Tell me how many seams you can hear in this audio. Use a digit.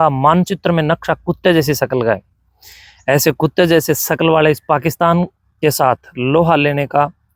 0